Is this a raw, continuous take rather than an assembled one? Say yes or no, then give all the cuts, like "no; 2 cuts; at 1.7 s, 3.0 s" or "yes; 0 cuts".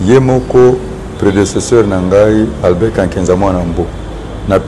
yes; 0 cuts